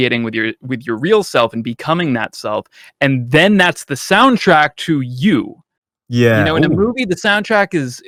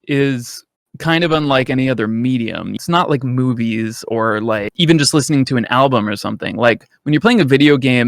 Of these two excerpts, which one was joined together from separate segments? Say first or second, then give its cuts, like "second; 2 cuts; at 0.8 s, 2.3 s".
second; 2 cuts; at 2.8 s, 4.7 s